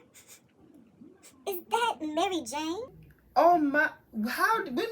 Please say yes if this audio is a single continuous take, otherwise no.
yes